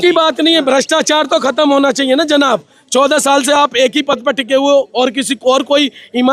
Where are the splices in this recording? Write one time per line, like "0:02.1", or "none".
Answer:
none